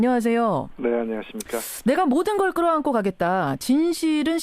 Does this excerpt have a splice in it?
yes; 1 cut; at 3.0 s

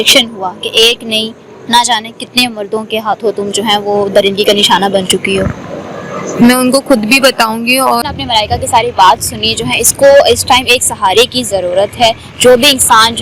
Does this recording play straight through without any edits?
no; 1 cut; at 8.1 s

